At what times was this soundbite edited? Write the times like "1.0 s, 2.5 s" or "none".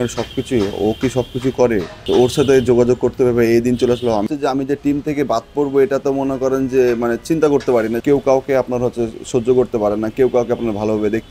1.9 s, 4.3 s, 8.0 s